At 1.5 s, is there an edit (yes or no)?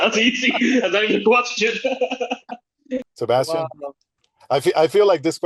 no